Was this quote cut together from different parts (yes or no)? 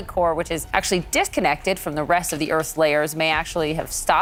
no